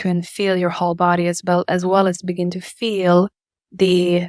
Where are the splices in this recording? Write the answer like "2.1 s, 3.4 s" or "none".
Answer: none